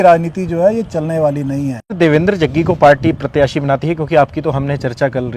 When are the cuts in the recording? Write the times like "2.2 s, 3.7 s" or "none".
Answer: 1.9 s